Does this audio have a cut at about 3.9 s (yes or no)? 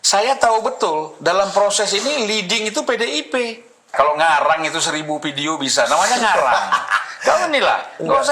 yes